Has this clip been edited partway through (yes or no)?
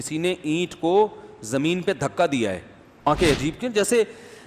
yes